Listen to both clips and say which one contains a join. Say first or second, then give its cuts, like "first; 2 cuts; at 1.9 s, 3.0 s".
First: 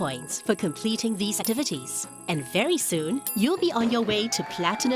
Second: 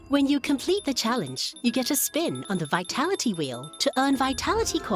first; 1 cut; at 1.4 s